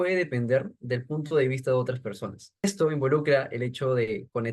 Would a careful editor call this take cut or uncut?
cut